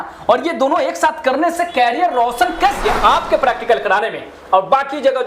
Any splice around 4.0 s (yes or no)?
no